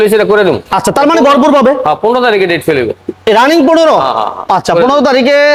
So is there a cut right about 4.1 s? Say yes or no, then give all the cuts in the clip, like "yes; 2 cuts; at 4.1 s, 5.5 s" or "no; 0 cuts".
no; 0 cuts